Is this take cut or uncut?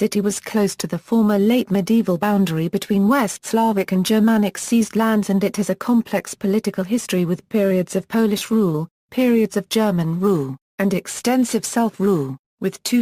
cut